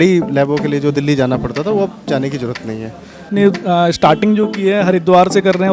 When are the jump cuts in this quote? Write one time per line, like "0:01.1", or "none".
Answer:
0:03.3